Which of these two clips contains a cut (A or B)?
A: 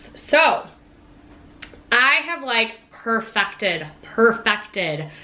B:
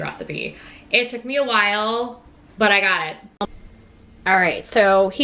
B